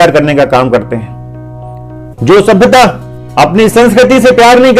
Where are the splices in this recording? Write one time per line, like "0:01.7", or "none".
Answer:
none